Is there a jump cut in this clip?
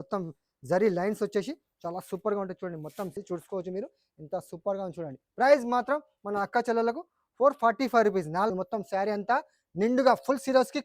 yes; 2 cuts; at 3.1 s, 8.5 s

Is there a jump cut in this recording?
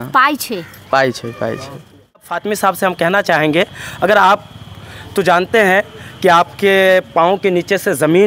yes; 1 cut; at 2.2 s

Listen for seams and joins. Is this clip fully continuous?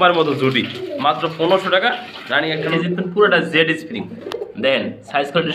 no; 1 cut; at 2.7 s

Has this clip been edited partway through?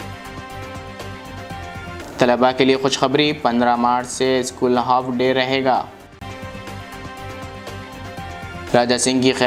no; 0 cuts

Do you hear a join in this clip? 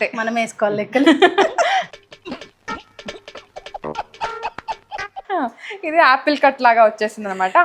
no; 0 cuts

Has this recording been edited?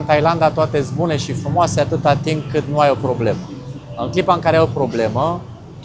no; 0 cuts

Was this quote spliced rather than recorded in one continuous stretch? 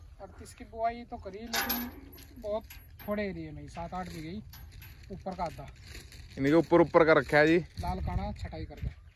no; 0 cuts

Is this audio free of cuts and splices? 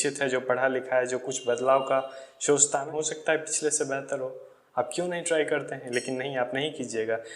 no; 1 cut; at 2.9 s

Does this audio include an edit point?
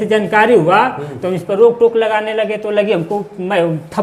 no; 0 cuts

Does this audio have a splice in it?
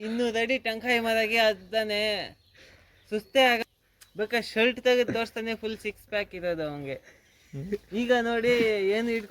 yes; 1 cut; at 3.6 s

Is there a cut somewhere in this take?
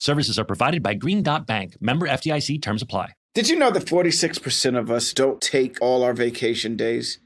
yes; 1 cut; at 3.2 s

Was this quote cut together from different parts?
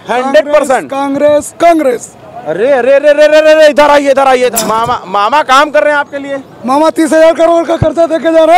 yes; 1 cut; at 4.5 s

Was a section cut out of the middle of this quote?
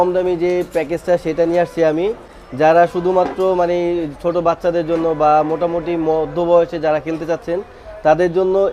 no; 0 cuts

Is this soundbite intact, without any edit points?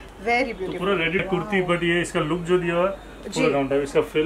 no; 1 cut; at 1.2 s

